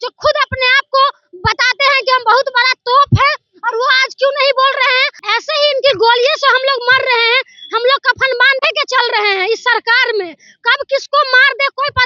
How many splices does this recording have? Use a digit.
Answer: 1